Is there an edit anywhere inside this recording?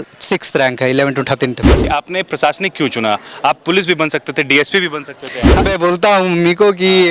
yes; 2 cuts; at 1.9 s, 5.7 s

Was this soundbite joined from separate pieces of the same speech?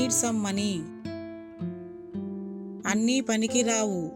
yes; 2 cuts; at 1.1 s, 2.8 s

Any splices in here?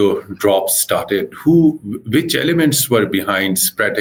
no; 0 cuts

